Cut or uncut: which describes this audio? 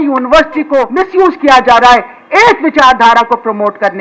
cut